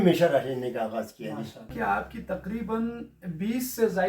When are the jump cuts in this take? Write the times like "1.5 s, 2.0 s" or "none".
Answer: 1.7 s